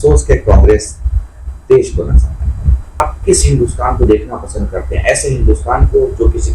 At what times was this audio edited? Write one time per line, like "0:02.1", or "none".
0:03.0